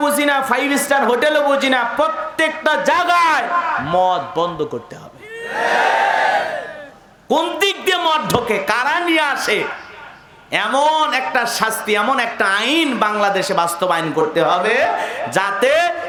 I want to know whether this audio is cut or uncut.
uncut